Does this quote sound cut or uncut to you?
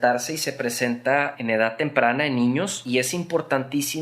cut